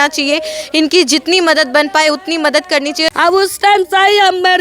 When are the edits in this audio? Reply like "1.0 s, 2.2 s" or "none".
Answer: 3.1 s